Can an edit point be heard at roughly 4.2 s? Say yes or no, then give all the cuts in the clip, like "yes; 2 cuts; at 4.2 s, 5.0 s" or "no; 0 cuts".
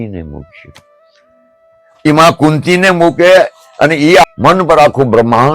yes; 1 cut; at 4.2 s